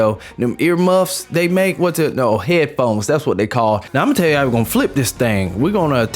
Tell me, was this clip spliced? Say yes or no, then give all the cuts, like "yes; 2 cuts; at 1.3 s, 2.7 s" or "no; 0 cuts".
yes; 1 cut; at 3.9 s